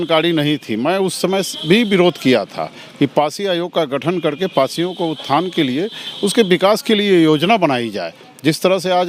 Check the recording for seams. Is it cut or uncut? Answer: uncut